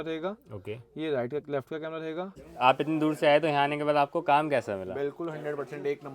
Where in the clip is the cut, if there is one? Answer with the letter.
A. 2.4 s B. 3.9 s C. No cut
A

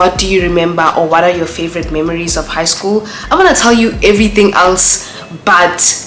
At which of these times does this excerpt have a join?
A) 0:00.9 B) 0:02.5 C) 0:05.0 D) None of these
D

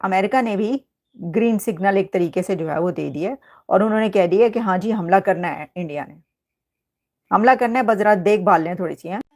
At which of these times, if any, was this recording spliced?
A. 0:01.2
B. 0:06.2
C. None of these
C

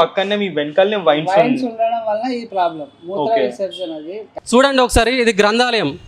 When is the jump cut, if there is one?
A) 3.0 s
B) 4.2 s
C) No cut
B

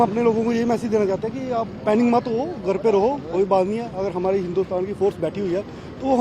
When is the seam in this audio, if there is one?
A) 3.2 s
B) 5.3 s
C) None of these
C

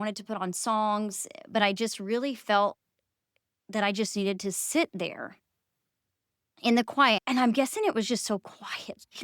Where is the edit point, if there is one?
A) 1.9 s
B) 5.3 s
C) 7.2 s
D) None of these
C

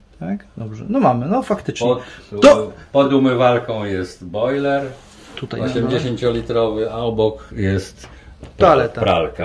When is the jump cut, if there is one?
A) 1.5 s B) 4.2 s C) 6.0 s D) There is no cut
D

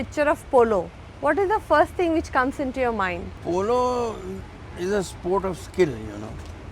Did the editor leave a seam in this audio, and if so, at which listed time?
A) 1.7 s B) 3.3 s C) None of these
B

